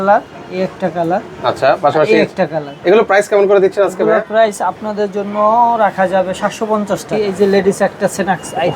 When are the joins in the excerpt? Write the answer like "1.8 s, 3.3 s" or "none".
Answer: 7.2 s